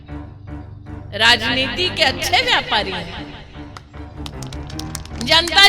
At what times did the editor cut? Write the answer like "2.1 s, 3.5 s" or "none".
1.0 s, 3.2 s, 4.8 s